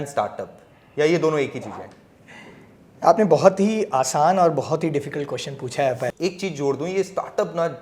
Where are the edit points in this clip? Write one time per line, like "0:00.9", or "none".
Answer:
0:06.1